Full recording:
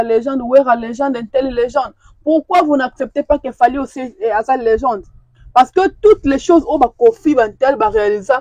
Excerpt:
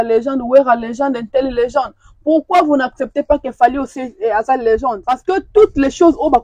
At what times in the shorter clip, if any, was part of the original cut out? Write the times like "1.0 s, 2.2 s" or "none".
5.2 s